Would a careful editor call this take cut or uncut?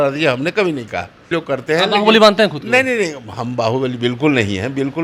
cut